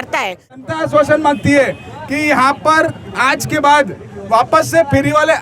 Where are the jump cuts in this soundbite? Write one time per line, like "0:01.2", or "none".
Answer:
0:01.0